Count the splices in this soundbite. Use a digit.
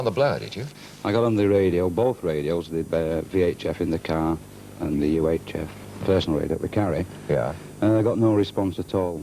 0